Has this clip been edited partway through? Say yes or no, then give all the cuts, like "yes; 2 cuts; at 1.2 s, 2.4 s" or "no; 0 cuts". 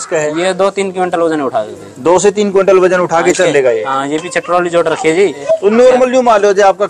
yes; 1 cut; at 5.4 s